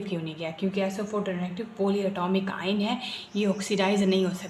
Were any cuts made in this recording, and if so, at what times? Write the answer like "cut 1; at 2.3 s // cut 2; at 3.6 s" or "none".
none